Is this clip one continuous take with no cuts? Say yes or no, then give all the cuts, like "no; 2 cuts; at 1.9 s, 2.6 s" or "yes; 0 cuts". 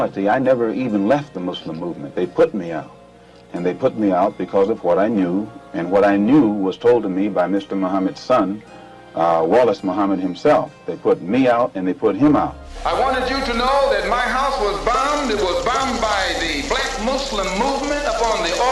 no; 1 cut; at 12.7 s